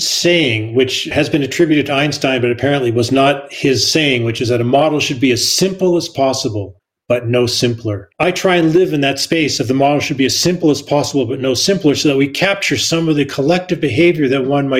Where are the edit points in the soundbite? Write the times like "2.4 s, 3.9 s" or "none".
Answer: 1.1 s, 8.0 s

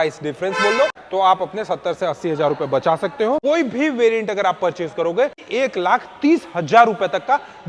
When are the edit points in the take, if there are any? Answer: 1.0 s, 3.4 s, 5.4 s

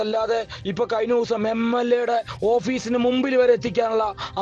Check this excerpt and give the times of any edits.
3.0 s

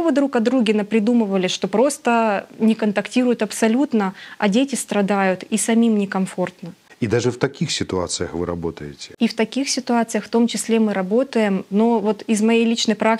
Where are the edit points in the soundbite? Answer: none

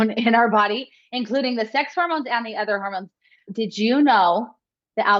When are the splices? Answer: none

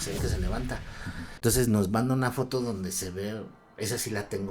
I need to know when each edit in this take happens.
1.3 s

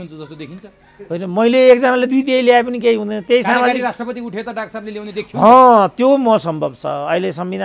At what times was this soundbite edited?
none

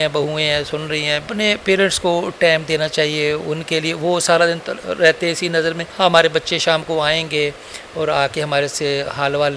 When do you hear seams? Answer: 1.3 s, 5.9 s

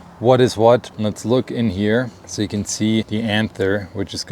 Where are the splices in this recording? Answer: 0.9 s, 2.2 s, 3.1 s

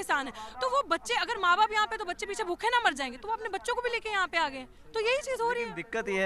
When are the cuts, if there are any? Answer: none

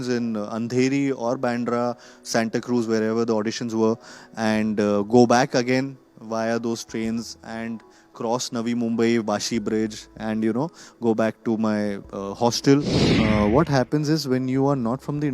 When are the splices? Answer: 13.0 s

